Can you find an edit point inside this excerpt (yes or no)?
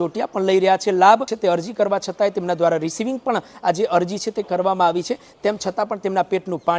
yes